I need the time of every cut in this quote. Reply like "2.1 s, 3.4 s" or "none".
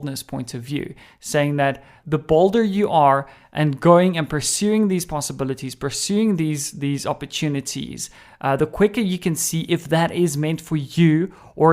2.0 s

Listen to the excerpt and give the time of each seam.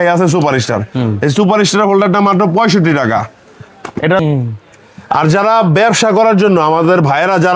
4.2 s

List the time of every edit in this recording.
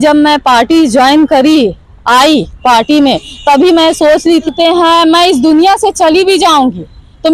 4.5 s

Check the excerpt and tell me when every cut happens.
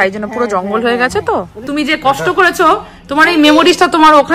1.6 s

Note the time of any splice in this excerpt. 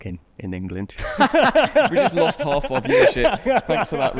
none

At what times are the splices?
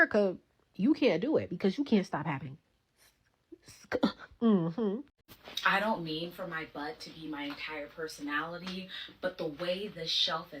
5.2 s

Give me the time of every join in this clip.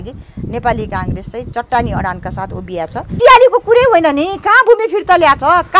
3.2 s

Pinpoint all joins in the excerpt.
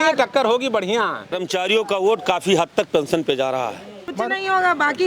1.4 s, 4.1 s

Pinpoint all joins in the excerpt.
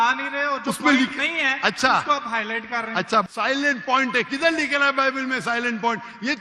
3.3 s

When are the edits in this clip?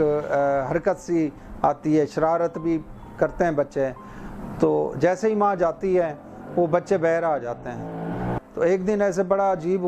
8.3 s

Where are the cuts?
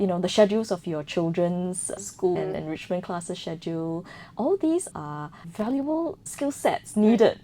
5.0 s, 6.2 s

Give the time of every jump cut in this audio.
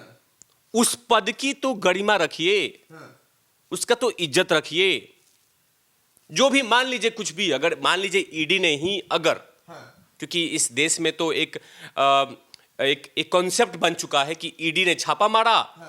none

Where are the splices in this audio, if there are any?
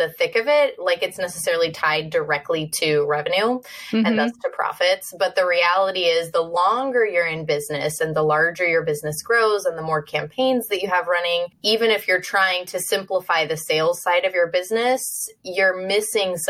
11.5 s

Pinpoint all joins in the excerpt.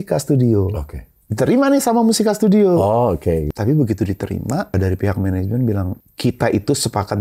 3.5 s, 4.7 s, 5.9 s

